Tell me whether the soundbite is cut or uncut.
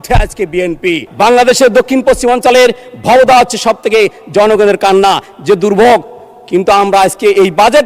cut